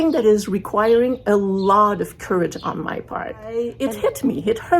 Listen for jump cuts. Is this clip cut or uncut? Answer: cut